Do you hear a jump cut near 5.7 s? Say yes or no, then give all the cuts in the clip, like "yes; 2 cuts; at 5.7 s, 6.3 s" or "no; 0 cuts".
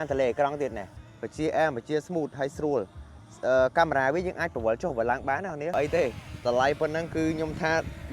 yes; 1 cut; at 5.7 s